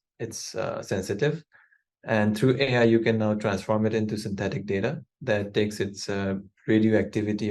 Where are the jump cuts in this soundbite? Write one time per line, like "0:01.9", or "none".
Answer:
none